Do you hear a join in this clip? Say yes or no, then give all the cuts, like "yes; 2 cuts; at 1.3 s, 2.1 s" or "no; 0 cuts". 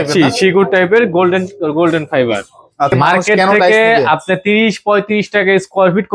yes; 1 cut; at 2.9 s